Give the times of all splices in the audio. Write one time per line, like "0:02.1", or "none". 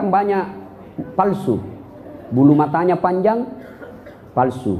none